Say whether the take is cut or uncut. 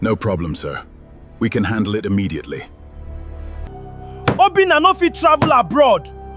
cut